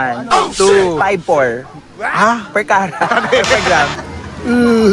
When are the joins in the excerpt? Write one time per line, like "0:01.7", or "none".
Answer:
0:04.0